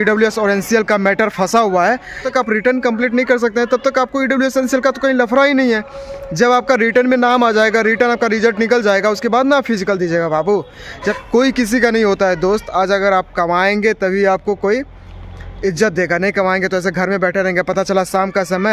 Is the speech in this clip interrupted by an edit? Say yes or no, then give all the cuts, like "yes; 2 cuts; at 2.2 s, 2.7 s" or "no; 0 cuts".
yes; 2 cuts; at 2.2 s, 11.0 s